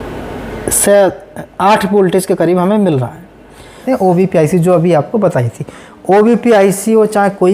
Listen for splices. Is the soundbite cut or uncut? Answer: cut